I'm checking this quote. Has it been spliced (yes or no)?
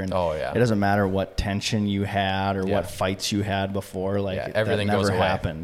no